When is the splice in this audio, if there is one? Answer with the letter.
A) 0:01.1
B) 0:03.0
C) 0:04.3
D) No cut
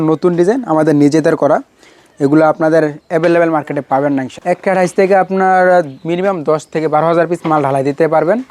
C